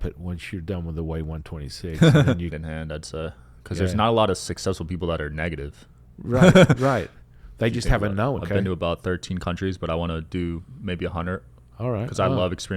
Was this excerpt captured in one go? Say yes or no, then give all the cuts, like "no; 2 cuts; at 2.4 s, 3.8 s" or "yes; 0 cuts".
no; 2 cuts; at 2.5 s, 8.4 s